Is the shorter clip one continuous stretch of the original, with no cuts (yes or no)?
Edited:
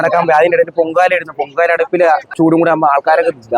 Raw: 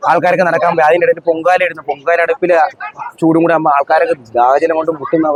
no